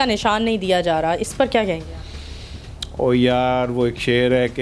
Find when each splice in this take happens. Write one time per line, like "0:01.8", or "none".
none